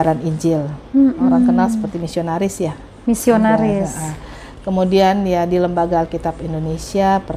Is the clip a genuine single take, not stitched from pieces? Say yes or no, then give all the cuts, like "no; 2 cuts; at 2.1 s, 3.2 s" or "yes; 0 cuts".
yes; 0 cuts